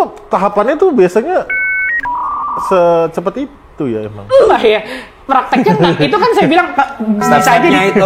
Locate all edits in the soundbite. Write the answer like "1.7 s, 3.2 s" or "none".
none